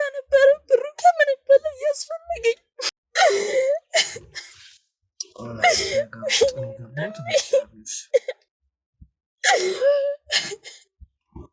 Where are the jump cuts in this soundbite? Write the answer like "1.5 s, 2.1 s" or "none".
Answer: 2.8 s